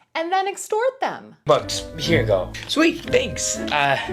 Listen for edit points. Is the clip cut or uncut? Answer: cut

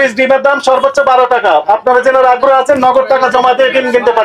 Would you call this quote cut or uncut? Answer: uncut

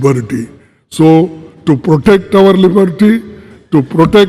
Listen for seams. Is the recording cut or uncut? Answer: uncut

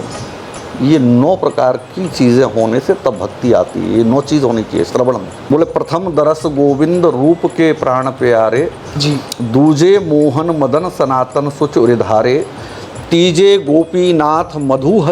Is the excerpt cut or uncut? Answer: cut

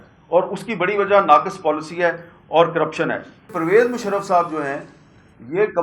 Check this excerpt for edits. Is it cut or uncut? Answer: cut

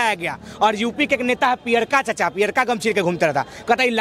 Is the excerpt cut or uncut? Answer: uncut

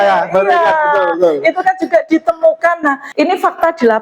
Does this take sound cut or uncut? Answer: cut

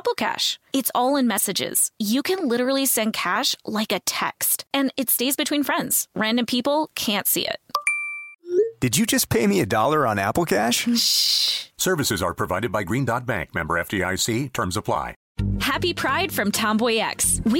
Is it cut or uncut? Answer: cut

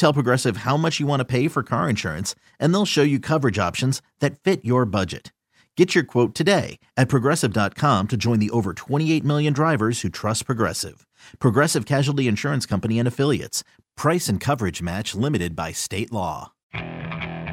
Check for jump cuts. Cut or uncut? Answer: cut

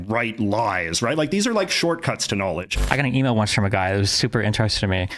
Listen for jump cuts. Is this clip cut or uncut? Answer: cut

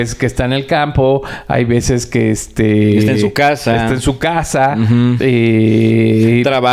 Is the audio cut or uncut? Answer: uncut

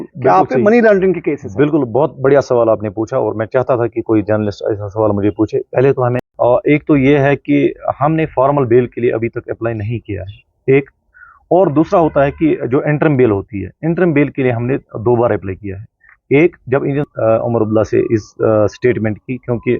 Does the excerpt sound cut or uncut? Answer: cut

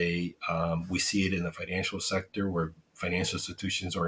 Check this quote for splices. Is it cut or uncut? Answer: uncut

